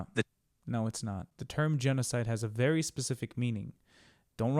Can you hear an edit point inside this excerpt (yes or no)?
yes